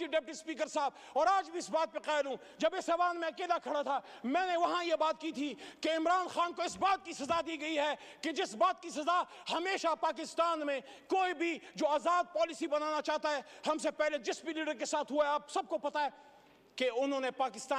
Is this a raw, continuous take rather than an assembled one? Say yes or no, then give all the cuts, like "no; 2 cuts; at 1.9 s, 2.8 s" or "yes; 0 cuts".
yes; 0 cuts